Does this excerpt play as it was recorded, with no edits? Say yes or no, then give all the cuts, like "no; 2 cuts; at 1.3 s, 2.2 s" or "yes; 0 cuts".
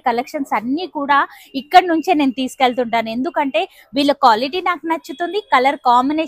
yes; 0 cuts